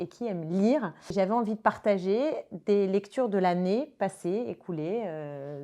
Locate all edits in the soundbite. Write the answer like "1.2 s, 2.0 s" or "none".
1.0 s